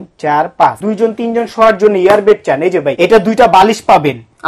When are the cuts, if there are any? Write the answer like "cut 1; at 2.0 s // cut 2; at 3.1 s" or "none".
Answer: cut 1; at 0.8 s // cut 2; at 2.9 s